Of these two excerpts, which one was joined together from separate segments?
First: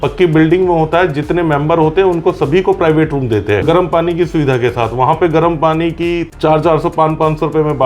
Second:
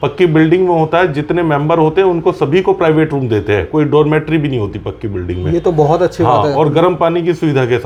first; 2 cuts; at 3.6 s, 6.3 s

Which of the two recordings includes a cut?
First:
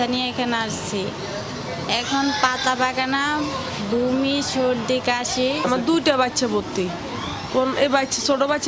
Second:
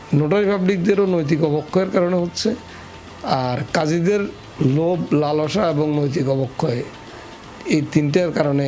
first; 1 cut; at 5.6 s

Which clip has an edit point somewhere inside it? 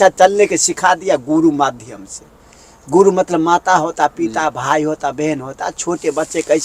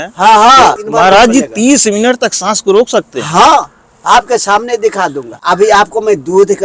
second; 2 cuts; at 0.8 s, 5.4 s

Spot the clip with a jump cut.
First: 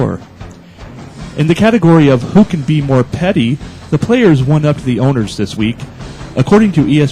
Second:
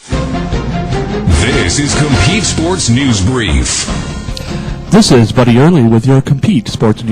second; 1 cut; at 4.8 s

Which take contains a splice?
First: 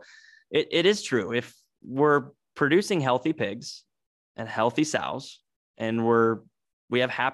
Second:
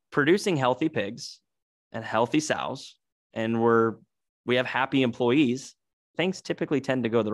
second; 1 cut; at 6.1 s

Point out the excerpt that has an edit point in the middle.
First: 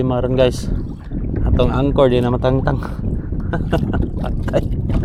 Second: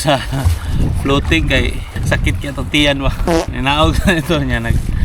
second; 2 cuts; at 1.9 s, 3.4 s

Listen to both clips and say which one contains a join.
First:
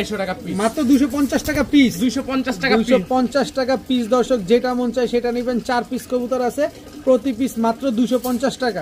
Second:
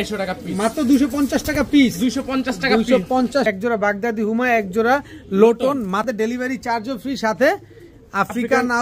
second; 2 cuts; at 3.5 s, 6.0 s

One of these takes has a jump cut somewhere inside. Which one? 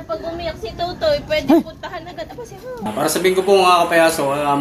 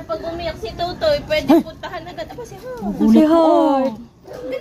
first; 1 cut; at 2.8 s

